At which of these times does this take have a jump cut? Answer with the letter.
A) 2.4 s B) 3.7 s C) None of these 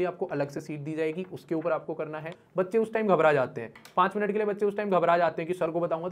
A